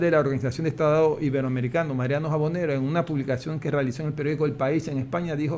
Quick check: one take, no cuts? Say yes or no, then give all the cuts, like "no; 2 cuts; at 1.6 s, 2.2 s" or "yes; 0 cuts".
yes; 0 cuts